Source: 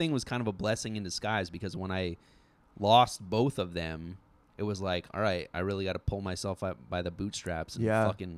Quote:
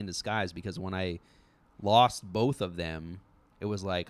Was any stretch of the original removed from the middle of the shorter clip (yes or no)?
no